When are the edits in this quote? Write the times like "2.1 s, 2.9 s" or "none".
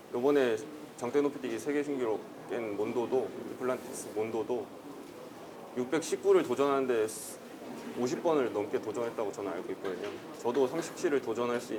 none